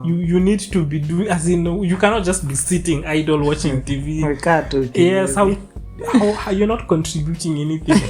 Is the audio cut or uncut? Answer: uncut